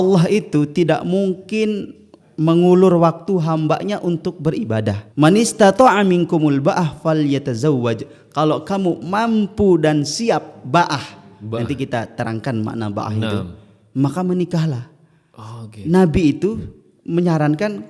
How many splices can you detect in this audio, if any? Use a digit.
1